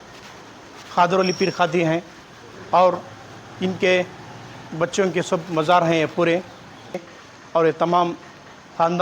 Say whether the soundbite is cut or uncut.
cut